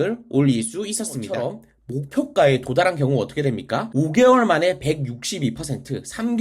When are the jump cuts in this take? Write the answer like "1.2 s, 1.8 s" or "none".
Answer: 1.8 s